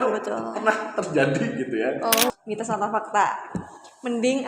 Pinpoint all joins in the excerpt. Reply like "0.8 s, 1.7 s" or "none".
2.3 s